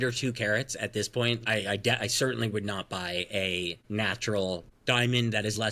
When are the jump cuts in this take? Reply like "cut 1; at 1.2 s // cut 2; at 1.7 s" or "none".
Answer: cut 1; at 1.4 s // cut 2; at 3.8 s // cut 3; at 4.7 s